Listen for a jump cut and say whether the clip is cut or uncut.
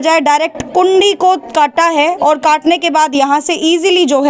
uncut